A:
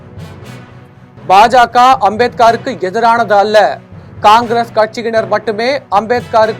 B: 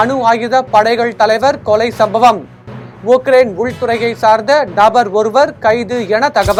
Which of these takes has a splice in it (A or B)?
A